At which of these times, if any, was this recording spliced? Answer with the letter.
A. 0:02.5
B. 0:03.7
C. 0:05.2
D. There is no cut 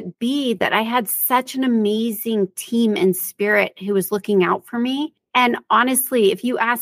C